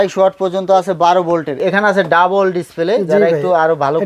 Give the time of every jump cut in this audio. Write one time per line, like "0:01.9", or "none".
0:01.6